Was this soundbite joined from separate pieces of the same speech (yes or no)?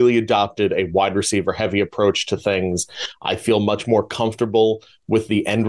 no